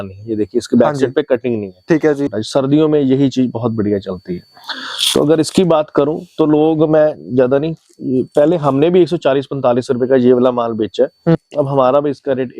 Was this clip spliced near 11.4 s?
yes; 2 cuts; at 2.2 s, 11.4 s

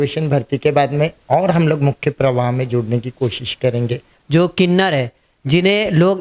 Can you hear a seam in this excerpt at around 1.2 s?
no; 1 cut; at 4.1 s

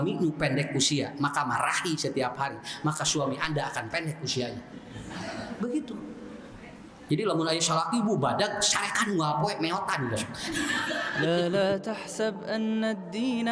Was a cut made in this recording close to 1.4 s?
no; 1 cut; at 11.3 s

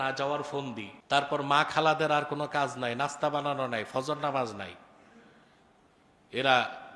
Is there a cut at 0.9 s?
yes; 1 cut; at 0.9 s

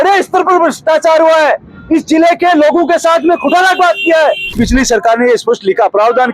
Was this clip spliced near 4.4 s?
yes; 1 cut; at 4.4 s

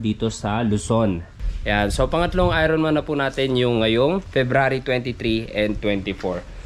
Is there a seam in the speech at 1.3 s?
no; 0 cuts

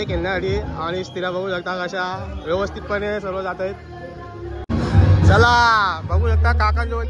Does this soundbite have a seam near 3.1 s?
no; 1 cut; at 4.6 s

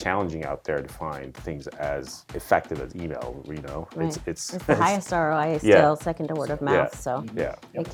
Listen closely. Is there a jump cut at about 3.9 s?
no; 0 cuts

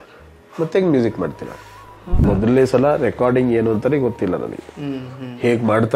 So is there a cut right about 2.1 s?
yes; 1 cut; at 2.1 s

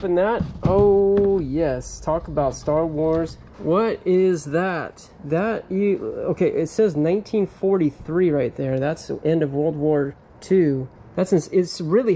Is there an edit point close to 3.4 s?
yes; 3 cuts; at 3.4 s, 5.1 s, 11.0 s

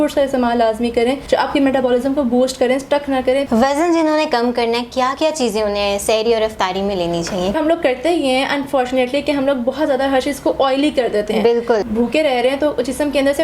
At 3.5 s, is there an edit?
yes; 4 cuts; at 1.2 s, 3.5 s, 7.5 s, 11.9 s

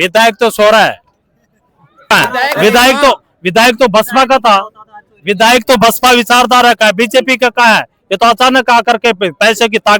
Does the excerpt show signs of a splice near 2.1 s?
yes; 1 cut; at 2.1 s

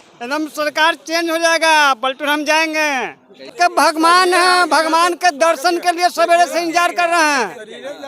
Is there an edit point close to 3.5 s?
yes; 1 cut; at 3.5 s

